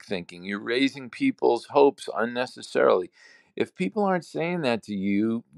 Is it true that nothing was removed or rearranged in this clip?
yes; 0 cuts

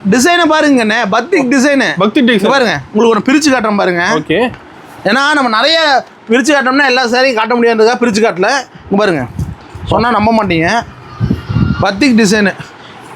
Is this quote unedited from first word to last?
yes; 0 cuts

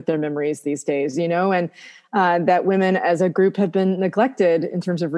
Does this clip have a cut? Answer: no; 0 cuts

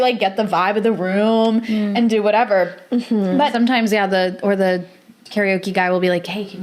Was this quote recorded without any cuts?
yes; 0 cuts

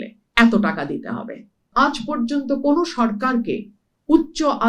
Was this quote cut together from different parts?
yes; 1 cut; at 1.7 s

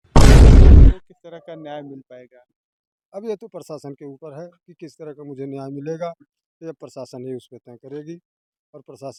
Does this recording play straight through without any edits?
yes; 0 cuts

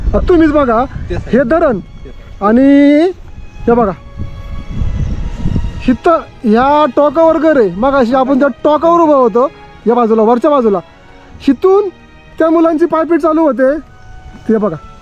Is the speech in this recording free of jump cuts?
yes; 0 cuts

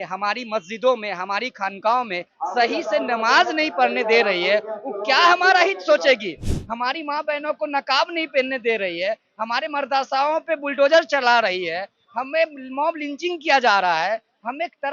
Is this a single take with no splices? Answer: yes; 0 cuts

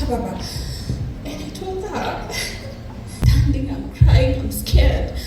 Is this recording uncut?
no; 1 cut; at 3.3 s

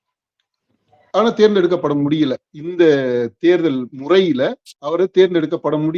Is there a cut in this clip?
no; 0 cuts

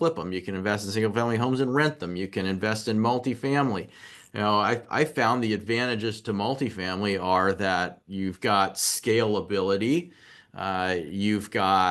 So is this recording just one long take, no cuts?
yes; 0 cuts

